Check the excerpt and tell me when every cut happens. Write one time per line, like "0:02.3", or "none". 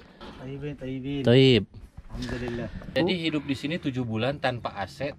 0:02.8